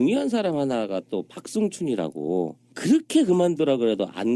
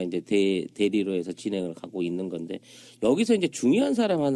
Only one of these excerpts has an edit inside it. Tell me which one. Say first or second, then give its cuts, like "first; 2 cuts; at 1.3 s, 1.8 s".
first; 1 cut; at 1.9 s